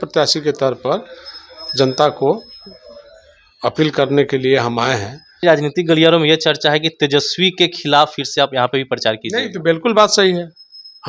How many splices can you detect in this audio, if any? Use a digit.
1